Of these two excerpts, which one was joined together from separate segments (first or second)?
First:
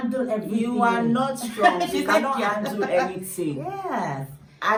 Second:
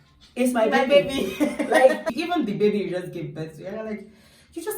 second